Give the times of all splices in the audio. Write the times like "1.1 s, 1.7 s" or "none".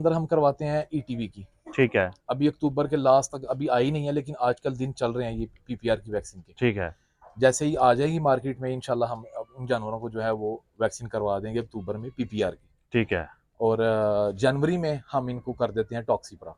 none